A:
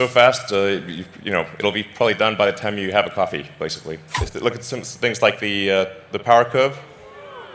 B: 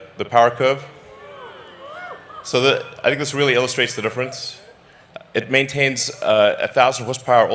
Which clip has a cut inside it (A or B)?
A